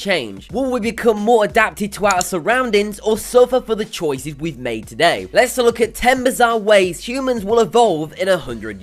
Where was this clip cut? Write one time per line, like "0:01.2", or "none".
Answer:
0:04.8